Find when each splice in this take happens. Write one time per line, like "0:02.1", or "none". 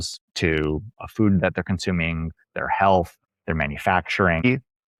none